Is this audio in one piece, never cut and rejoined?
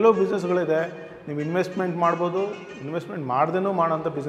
yes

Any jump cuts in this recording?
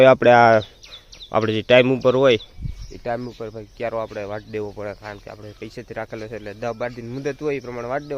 no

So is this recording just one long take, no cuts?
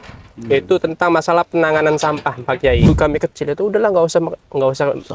no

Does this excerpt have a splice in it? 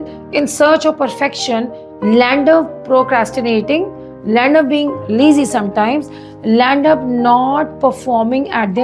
no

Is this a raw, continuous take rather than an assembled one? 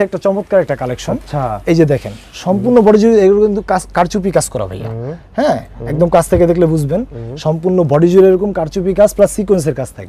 yes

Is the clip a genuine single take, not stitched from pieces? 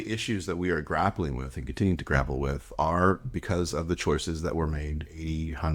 yes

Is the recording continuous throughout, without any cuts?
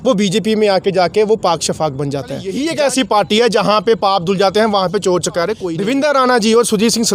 no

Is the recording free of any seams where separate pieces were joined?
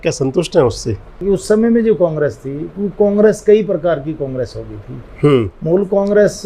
no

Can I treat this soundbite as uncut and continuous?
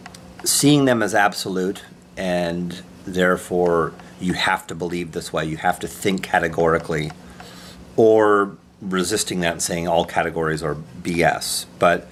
yes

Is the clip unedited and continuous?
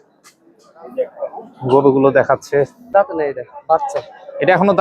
no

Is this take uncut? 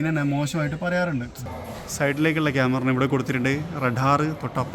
no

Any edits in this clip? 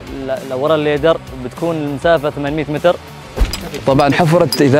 yes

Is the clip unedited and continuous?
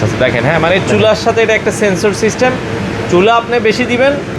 yes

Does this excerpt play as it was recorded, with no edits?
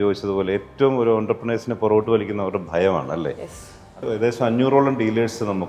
no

